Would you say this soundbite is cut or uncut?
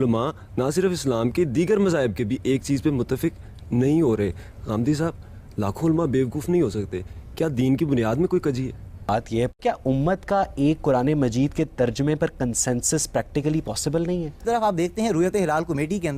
cut